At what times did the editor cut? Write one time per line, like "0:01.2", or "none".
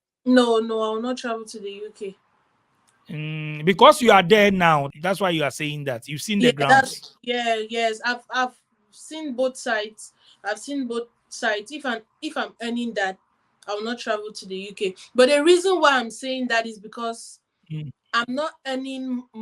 0:04.9